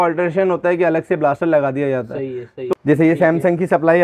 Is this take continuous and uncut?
no; 1 cut; at 2.7 s

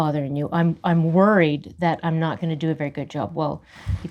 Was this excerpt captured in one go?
yes; 0 cuts

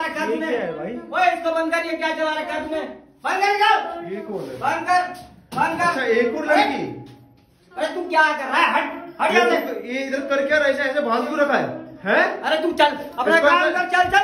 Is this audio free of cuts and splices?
yes; 0 cuts

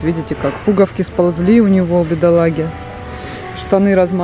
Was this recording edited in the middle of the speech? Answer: no; 0 cuts

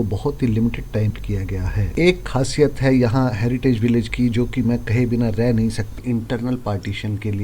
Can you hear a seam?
yes; 2 cuts; at 1.1 s, 6.0 s

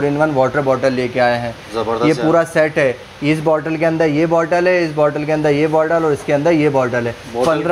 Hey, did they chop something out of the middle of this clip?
no; 0 cuts

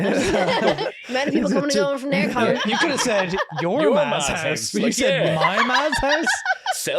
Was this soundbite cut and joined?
yes; 2 cuts; at 0.8 s, 2.6 s

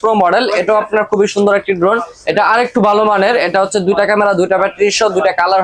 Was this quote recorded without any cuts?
yes; 0 cuts

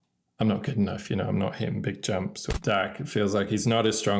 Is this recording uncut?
no; 1 cut; at 2.4 s

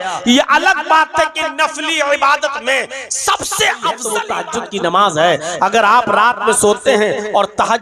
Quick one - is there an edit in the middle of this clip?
yes; 1 cut; at 4.2 s

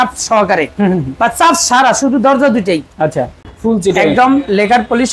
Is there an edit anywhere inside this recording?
yes; 1 cut; at 3.4 s

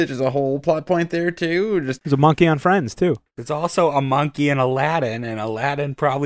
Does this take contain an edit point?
yes; 2 cuts; at 1.9 s, 3.3 s

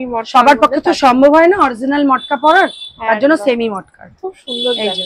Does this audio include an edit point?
no; 0 cuts

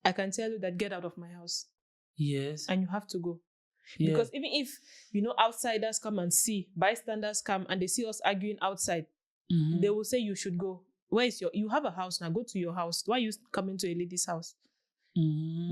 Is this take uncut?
yes; 0 cuts

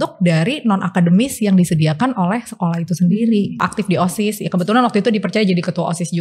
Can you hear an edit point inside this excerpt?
yes; 1 cut; at 3.6 s

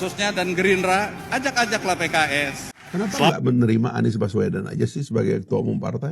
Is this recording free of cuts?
no; 1 cut; at 2.7 s

